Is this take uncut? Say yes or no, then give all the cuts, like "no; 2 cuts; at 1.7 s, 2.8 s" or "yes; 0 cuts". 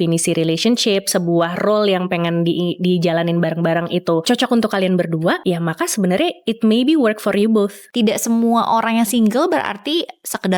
no; 3 cuts; at 4.2 s, 5.4 s, 7.8 s